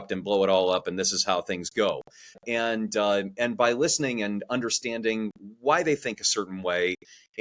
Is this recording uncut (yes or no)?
no